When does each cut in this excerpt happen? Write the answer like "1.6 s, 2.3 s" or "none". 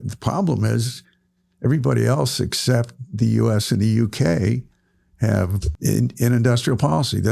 5.7 s